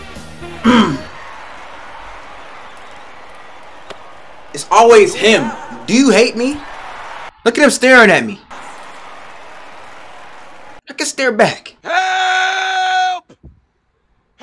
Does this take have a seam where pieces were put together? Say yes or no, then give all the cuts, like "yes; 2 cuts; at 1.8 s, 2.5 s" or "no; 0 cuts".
no; 0 cuts